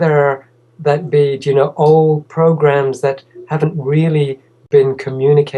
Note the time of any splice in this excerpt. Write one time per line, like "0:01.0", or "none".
0:03.0

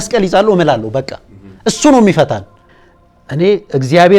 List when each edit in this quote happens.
0:02.5

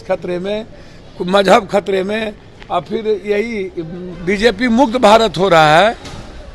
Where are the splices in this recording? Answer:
0:04.0

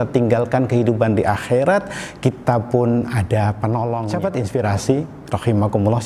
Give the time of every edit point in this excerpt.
0:04.1

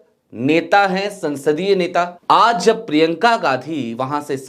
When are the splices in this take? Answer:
0:02.2

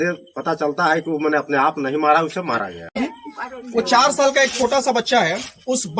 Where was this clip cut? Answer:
0:03.0

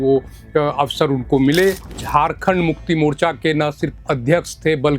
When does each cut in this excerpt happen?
0:01.9

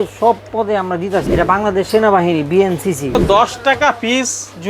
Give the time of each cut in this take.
0:01.2
0:03.2

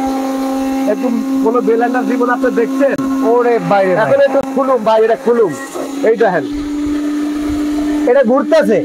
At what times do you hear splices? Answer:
none

